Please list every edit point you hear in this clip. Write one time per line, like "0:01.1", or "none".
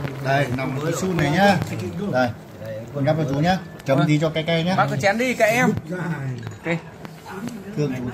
none